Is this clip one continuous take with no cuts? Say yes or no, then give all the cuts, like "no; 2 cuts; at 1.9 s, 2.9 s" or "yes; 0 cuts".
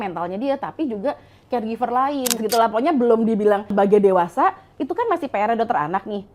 no; 2 cuts; at 2.4 s, 3.7 s